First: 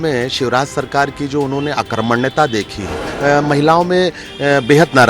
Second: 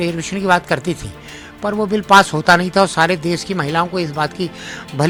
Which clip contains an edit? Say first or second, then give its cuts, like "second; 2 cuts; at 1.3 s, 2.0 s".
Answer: first; 1 cut; at 3.0 s